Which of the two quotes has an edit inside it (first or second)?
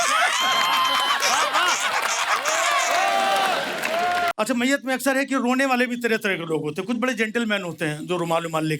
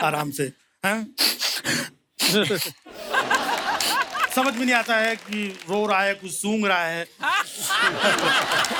first